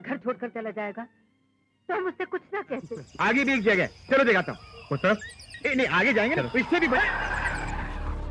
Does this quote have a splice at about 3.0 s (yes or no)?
yes